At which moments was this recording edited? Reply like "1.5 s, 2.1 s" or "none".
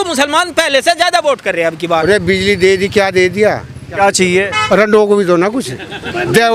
2.0 s, 3.9 s